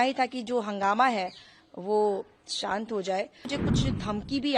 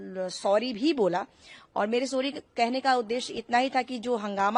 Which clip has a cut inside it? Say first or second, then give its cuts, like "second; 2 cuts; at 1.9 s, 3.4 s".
first; 1 cut; at 3.5 s